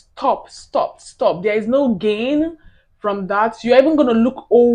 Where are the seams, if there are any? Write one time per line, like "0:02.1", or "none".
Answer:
none